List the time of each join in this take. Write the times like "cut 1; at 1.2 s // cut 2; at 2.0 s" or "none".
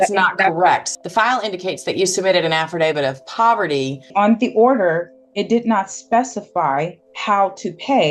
cut 1; at 0.9 s // cut 2; at 4.1 s // cut 3; at 7.1 s